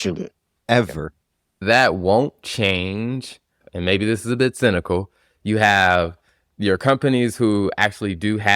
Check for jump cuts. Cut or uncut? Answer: cut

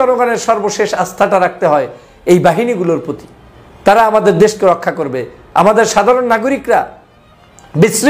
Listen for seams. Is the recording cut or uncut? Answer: uncut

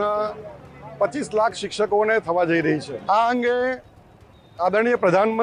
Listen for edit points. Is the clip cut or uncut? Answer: cut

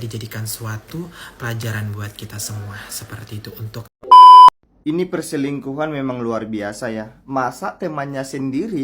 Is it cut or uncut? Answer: cut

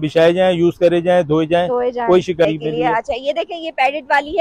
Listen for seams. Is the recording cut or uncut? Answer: cut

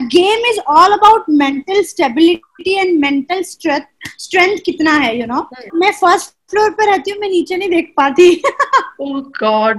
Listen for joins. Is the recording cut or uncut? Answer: cut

